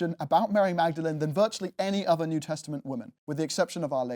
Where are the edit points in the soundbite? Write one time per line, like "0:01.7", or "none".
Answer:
0:03.2